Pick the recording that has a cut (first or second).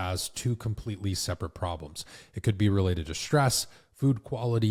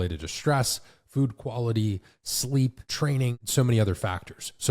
second